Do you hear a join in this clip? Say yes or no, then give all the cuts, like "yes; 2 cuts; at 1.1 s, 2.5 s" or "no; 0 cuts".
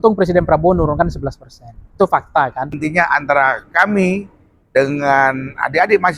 yes; 1 cut; at 2.8 s